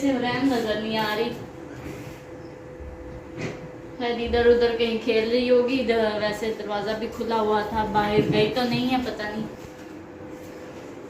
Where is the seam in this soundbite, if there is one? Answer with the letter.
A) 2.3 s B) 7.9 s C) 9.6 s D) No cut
C